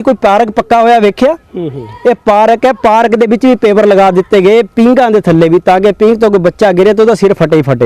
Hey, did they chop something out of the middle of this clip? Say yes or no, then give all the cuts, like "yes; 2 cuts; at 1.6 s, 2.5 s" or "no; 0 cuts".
no; 0 cuts